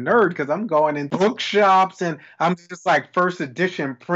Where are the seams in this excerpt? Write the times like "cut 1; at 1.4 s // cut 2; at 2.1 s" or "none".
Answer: cut 1; at 1.0 s